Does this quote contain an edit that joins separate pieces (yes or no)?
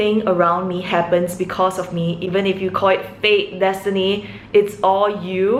no